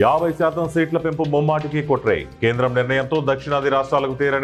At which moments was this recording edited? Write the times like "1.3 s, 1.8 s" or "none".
none